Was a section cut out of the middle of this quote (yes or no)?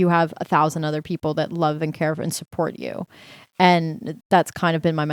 no